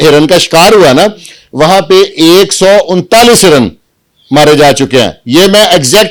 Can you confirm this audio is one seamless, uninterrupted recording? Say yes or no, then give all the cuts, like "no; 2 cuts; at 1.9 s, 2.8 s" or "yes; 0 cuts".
yes; 0 cuts